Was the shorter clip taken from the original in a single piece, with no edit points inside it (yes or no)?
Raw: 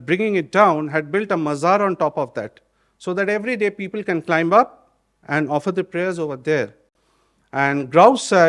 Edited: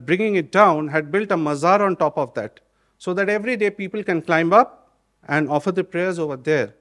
yes